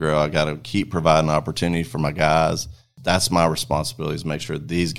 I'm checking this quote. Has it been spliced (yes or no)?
yes